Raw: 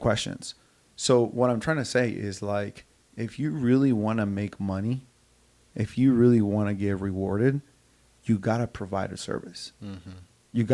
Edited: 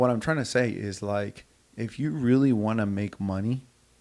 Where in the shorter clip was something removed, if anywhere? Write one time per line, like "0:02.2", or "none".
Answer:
none